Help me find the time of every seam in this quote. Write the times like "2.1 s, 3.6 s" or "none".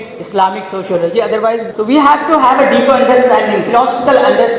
1.7 s